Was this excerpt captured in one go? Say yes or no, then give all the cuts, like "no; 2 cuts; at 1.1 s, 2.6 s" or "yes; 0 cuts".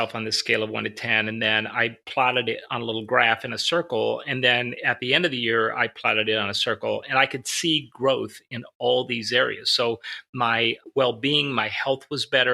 no; 2 cuts; at 2.0 s, 10.8 s